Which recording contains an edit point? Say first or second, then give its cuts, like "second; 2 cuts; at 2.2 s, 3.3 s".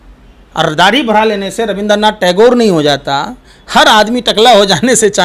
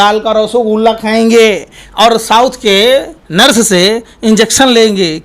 second; 1 cut; at 3.2 s